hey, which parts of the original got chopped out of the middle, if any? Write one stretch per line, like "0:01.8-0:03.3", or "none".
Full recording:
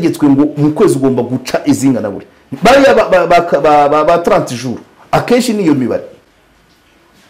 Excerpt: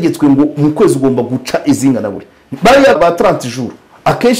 0:03.0-0:04.0